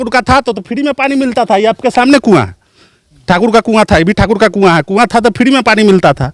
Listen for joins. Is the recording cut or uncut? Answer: uncut